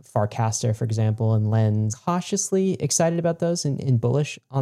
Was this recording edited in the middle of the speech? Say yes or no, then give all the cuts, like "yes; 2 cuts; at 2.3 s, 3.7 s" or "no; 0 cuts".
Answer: yes; 1 cut; at 1.9 s